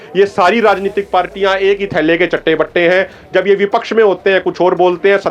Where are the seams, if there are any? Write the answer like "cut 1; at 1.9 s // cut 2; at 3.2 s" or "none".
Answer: none